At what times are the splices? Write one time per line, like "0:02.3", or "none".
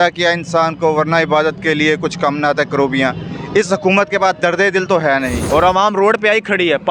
0:05.4